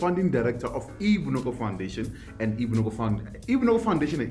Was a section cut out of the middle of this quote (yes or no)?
no